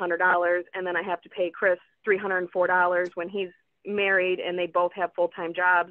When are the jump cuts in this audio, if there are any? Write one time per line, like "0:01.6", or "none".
none